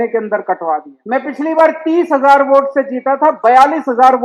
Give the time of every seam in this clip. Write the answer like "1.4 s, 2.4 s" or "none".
0.9 s